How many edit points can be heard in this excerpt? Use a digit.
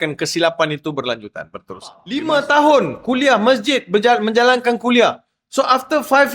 1